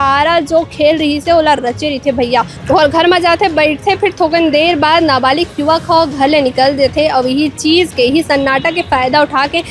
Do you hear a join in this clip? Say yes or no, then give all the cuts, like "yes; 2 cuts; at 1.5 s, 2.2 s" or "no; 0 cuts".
yes; 1 cut; at 2.6 s